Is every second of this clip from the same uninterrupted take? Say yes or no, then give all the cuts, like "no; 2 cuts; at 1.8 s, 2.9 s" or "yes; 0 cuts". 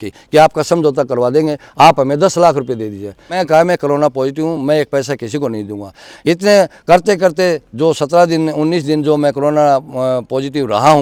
yes; 0 cuts